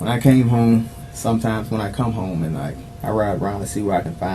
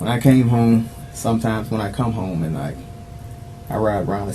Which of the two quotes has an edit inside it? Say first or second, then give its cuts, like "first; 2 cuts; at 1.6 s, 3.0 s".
first; 1 cut; at 2.9 s